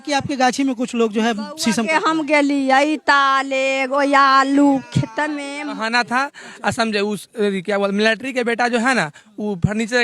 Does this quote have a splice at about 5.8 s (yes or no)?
yes